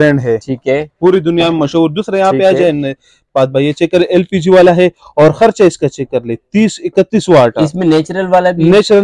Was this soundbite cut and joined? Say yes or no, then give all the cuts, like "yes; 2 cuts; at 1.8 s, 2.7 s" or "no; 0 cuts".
no; 0 cuts